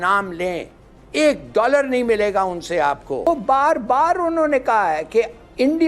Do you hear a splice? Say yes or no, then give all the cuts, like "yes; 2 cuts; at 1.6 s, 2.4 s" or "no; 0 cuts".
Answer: yes; 1 cut; at 3.3 s